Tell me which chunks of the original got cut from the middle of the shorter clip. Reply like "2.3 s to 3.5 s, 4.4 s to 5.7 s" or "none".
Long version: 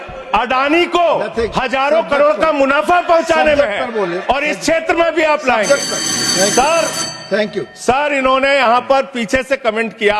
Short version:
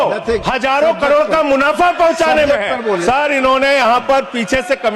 4.1 s to 7.8 s

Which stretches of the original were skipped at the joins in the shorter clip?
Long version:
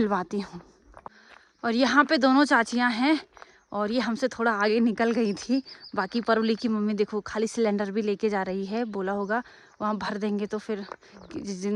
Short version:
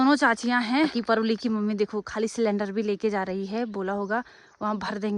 3.2 s to 6.1 s

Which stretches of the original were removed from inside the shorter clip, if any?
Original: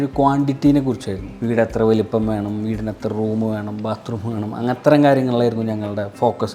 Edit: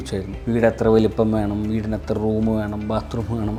none

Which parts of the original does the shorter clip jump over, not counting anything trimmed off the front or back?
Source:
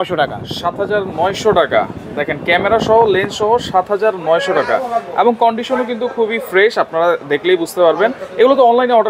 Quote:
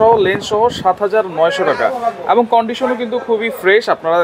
none

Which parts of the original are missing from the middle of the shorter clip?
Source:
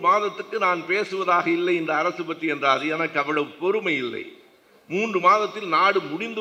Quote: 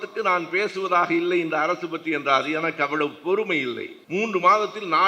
4.3 s to 4.7 s

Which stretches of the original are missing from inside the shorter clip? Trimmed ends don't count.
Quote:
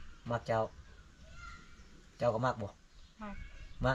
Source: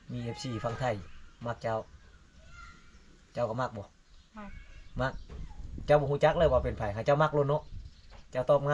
none

